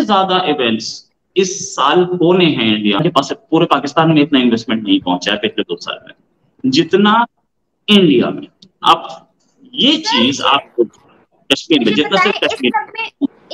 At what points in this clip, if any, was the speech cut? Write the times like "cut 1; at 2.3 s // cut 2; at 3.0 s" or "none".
cut 1; at 3.0 s